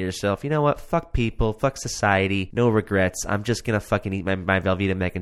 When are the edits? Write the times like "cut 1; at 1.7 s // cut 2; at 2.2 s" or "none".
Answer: cut 1; at 2.5 s